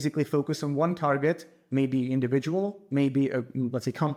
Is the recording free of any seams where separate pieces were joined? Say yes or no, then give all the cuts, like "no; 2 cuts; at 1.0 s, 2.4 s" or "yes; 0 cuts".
yes; 0 cuts